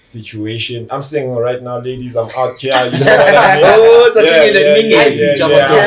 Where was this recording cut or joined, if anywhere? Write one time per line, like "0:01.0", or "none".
none